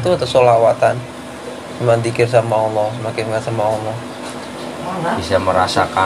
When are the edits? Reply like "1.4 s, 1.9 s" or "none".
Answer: 4.5 s